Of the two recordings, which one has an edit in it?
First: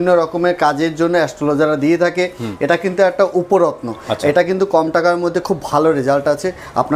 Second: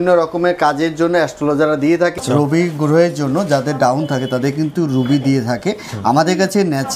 second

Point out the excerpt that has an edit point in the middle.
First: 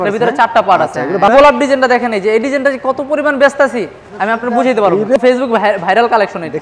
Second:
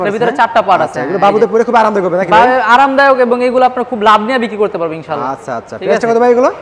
first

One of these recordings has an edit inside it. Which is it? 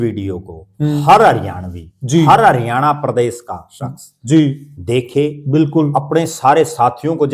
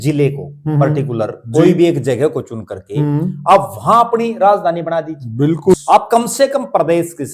second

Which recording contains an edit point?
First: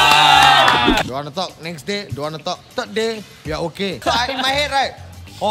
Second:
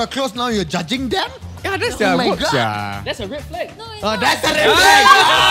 first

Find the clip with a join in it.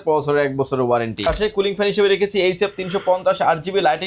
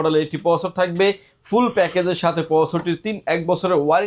first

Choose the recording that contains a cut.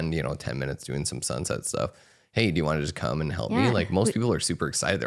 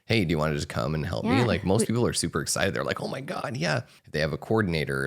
second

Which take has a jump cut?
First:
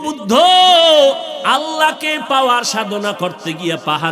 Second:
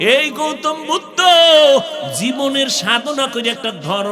first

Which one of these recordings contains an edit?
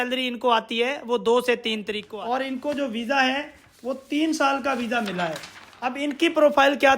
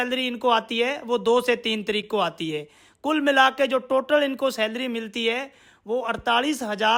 first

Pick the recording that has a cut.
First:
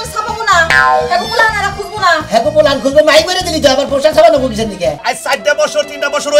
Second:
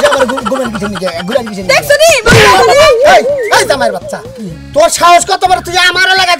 first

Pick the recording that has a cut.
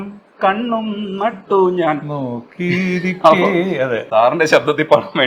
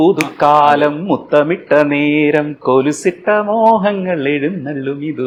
first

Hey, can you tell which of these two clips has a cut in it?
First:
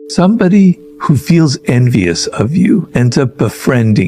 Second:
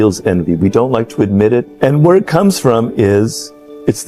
first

